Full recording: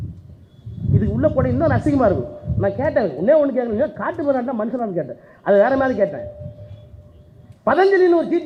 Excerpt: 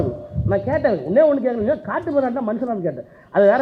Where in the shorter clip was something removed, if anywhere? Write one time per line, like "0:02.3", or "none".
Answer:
none